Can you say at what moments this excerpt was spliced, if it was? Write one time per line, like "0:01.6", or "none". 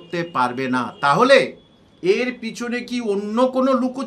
none